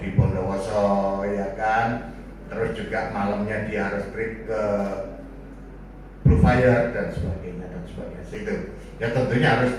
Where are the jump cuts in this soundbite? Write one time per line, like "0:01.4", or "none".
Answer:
0:08.3